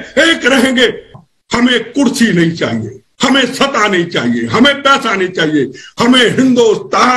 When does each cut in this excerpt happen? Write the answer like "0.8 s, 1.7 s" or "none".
1.2 s